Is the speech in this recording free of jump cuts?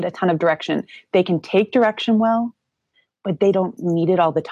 yes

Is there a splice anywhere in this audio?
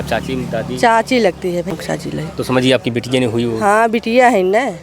yes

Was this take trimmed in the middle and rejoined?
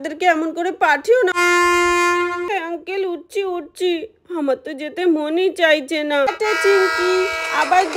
yes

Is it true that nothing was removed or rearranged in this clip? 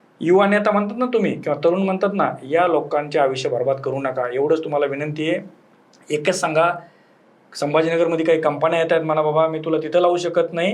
yes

